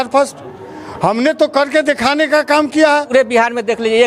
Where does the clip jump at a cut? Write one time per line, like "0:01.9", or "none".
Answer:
0:03.1